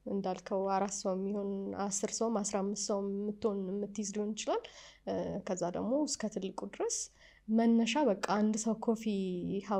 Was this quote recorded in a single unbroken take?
yes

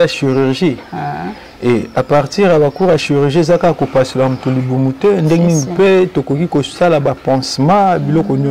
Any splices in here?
no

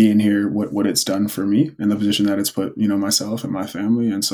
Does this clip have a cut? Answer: no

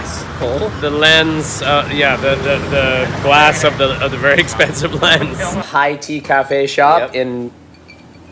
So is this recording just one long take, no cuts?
no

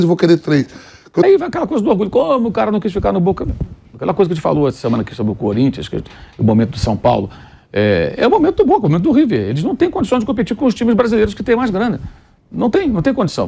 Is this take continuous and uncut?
no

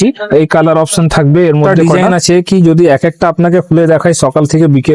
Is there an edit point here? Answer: yes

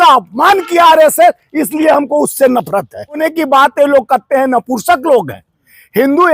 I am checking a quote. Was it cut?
yes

